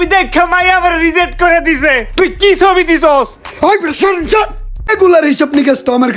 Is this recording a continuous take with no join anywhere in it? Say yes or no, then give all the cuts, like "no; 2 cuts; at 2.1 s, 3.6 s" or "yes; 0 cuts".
no; 1 cut; at 4.8 s